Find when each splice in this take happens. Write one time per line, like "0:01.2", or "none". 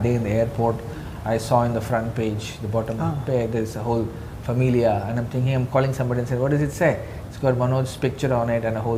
none